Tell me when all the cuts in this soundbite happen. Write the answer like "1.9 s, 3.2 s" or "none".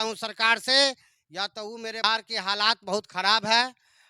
2.0 s